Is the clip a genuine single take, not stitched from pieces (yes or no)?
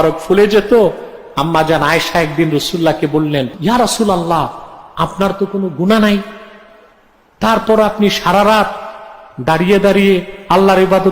no